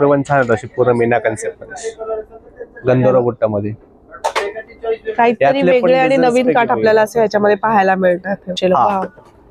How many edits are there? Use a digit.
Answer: 1